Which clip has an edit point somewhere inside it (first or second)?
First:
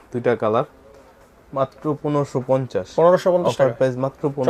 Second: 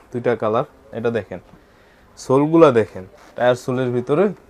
second